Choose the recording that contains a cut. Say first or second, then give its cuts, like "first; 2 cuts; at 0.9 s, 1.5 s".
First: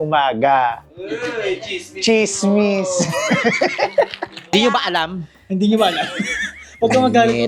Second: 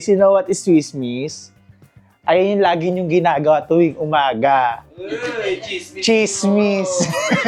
first; 1 cut; at 4.5 s